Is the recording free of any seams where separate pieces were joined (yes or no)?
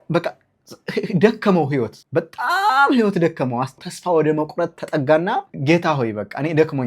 no